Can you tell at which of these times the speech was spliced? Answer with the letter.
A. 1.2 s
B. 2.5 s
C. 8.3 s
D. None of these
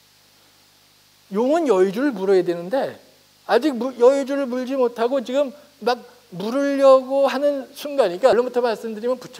C